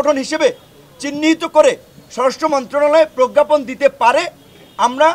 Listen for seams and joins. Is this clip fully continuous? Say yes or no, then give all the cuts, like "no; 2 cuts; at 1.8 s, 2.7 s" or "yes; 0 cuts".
yes; 0 cuts